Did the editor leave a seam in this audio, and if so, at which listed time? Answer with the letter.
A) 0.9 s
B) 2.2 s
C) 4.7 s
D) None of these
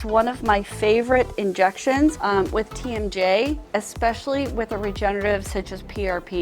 B